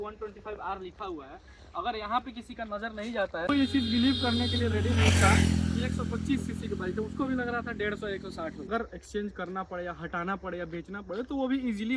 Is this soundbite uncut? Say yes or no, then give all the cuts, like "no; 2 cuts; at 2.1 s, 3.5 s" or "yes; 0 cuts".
no; 2 cuts; at 3.7 s, 8.7 s